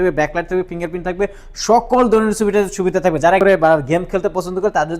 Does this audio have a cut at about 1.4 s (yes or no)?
no